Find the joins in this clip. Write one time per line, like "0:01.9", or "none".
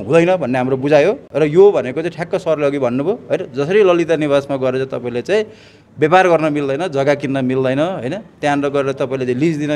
none